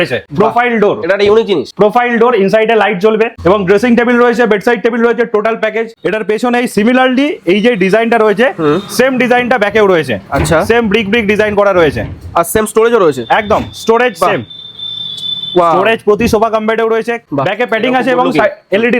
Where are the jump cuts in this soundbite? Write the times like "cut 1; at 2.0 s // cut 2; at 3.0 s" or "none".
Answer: cut 1; at 3.4 s // cut 2; at 5.9 s // cut 3; at 17.2 s